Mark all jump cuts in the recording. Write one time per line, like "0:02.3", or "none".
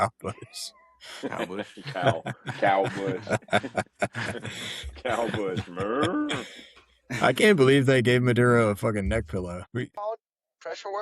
0:09.7